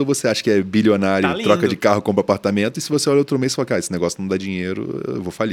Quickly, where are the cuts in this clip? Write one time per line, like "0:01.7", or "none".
none